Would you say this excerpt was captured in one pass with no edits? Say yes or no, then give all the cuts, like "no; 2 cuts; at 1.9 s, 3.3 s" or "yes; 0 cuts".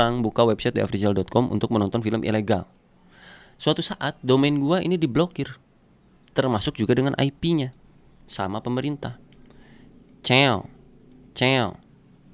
yes; 0 cuts